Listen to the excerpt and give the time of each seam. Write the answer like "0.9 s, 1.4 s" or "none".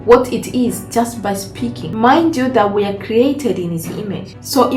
1.8 s

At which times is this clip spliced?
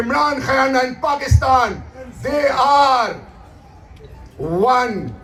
none

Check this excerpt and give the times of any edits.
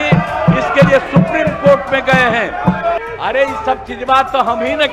3.0 s

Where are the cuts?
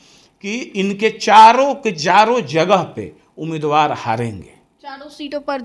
none

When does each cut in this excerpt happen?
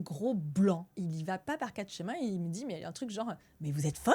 0.9 s

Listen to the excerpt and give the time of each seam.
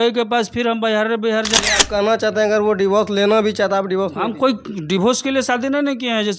1.5 s

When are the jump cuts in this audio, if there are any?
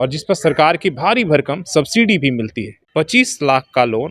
2.7 s

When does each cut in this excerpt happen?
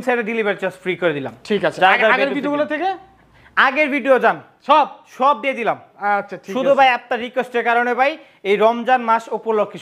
none

